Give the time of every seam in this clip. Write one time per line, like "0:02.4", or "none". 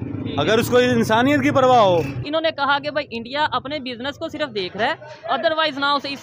0:02.2